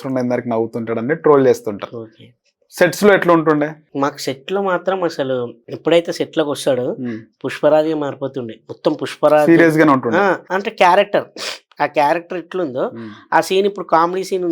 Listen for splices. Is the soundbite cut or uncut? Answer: cut